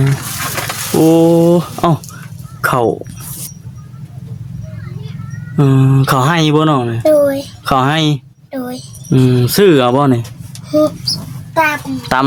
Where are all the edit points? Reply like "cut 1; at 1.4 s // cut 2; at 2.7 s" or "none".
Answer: none